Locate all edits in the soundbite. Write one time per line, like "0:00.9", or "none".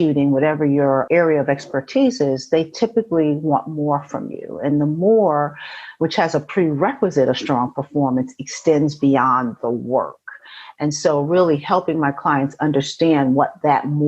0:01.0